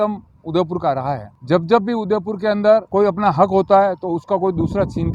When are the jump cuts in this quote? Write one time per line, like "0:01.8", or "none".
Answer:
0:01.3
0:02.9